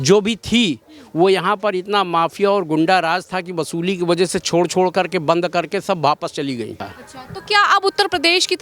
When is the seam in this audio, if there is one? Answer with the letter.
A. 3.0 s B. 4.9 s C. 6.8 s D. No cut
C